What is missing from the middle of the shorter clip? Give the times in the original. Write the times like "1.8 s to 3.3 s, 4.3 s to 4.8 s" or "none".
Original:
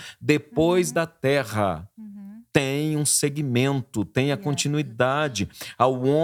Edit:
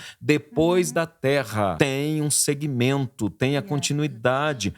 1.7 s to 2.5 s